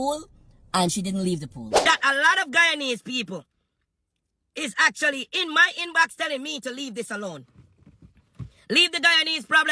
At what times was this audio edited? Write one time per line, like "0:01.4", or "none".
0:01.9